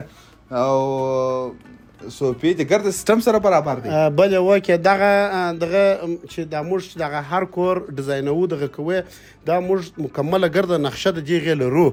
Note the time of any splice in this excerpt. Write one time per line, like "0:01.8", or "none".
none